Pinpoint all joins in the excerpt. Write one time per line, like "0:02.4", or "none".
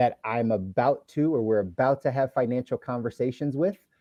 none